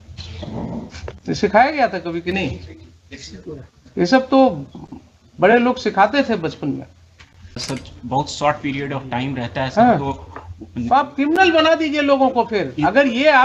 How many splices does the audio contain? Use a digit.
2